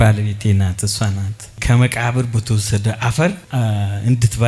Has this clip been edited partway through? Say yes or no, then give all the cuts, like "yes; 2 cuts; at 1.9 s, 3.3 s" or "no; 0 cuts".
yes; 1 cut; at 1.6 s